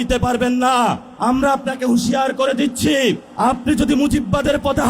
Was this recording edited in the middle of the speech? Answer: yes; 2 cuts; at 1.1 s, 3.3 s

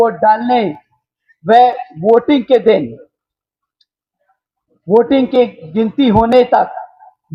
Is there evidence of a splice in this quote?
no; 0 cuts

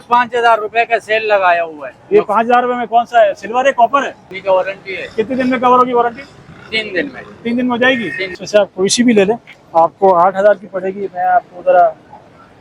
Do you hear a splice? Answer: yes; 2 cuts; at 4.3 s, 8.4 s

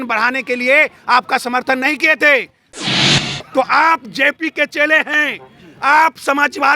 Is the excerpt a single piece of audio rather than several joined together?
no; 1 cut; at 2.9 s

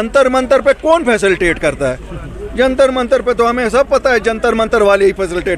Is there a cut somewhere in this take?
no; 0 cuts

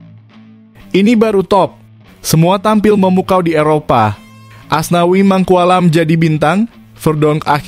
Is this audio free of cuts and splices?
no; 1 cut; at 0.9 s

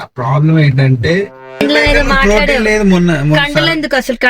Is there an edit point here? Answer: yes; 1 cut; at 1.6 s

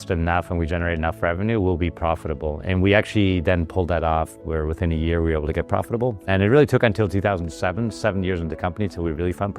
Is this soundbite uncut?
no; 1 cut; at 6.3 s

